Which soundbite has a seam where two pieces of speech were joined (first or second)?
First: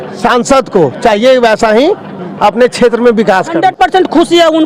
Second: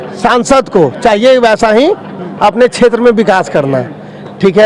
first